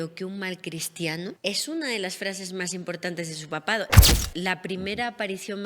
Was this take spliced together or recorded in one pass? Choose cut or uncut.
cut